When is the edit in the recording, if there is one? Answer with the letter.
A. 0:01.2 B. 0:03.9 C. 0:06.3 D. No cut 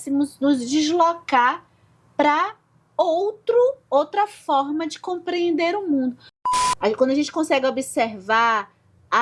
C